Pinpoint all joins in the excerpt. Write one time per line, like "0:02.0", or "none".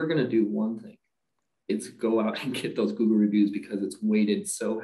none